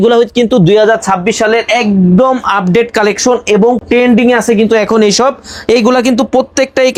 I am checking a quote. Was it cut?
no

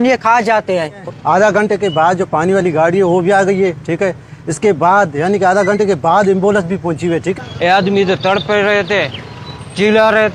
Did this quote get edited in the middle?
yes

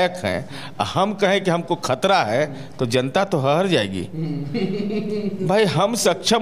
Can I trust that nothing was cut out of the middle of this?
yes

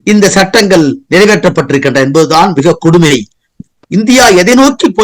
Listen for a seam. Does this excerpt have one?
no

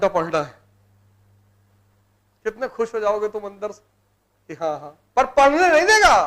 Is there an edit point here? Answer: no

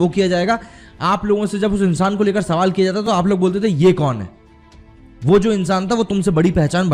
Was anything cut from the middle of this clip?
no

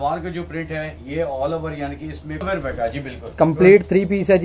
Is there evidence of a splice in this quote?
yes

